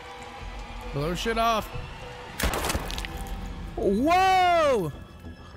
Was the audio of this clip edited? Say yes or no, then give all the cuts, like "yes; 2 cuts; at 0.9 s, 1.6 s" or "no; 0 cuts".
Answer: yes; 1 cut; at 2.5 s